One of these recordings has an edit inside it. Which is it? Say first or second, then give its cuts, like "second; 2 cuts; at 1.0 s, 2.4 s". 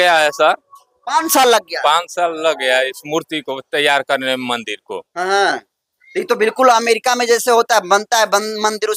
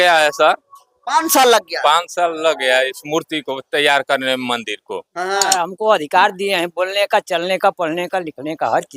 second; 1 cut; at 5.4 s